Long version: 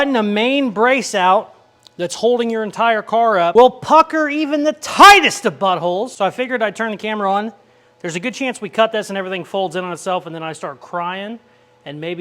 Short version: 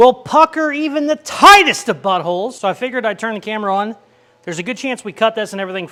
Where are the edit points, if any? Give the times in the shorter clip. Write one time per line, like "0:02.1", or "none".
none